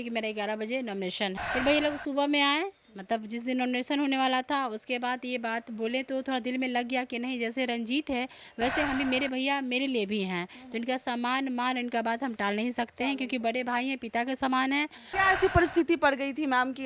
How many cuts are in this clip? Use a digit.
2